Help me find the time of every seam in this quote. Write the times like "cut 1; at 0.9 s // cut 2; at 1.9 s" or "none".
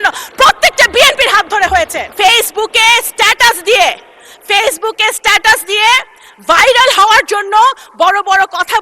cut 1; at 2.1 s

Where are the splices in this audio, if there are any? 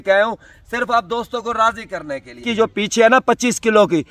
cut 1; at 2.4 s

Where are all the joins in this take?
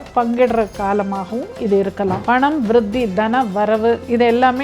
cut 1; at 2.2 s

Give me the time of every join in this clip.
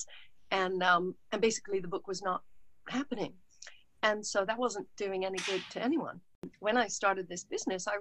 cut 1; at 6.5 s

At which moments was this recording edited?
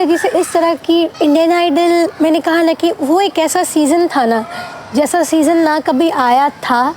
cut 1; at 1.1 s

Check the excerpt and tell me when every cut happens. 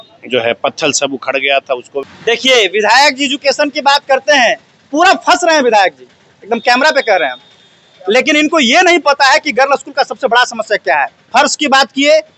cut 1; at 2.0 s

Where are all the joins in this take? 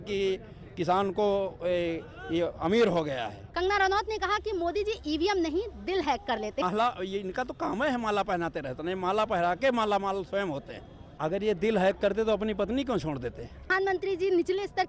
cut 1; at 3.5 s // cut 2; at 6.6 s // cut 3; at 11.0 s // cut 4; at 13.7 s

